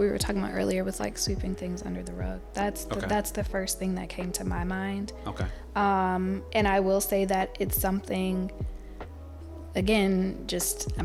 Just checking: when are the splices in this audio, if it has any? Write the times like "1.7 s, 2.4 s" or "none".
none